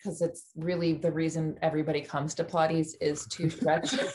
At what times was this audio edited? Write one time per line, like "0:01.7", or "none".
none

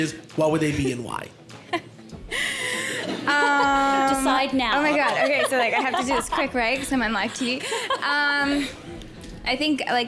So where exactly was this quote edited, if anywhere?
none

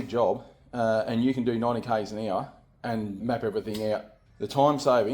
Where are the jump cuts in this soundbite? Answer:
0:03.2
0:04.2

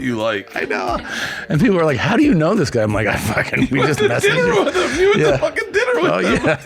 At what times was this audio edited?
none

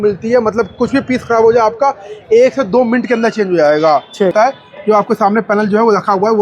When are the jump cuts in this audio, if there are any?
0:04.3

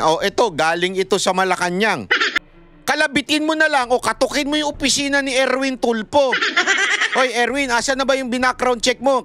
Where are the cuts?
0:02.2

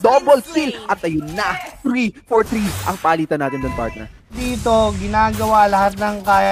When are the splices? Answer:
0:04.4

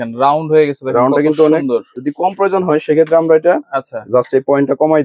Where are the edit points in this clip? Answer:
0:01.9

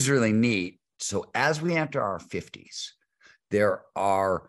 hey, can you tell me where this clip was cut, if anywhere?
0:00.9

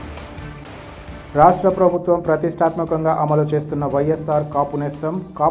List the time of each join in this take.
none

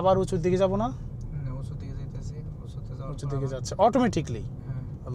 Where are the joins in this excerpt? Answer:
none

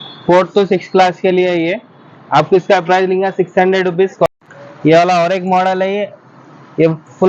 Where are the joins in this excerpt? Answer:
0:04.3

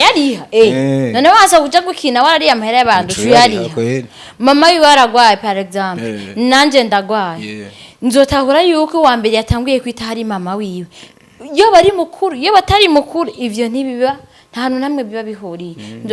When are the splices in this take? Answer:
none

